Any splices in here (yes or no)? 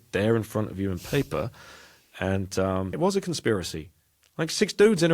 yes